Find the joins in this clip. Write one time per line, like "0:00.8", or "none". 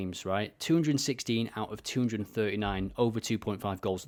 none